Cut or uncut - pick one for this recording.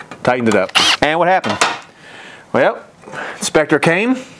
cut